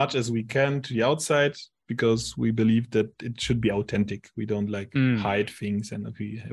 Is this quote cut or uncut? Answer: uncut